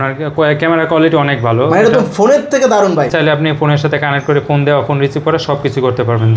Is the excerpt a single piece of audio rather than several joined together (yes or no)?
no